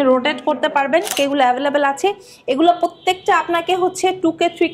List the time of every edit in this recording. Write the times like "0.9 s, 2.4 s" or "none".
1.1 s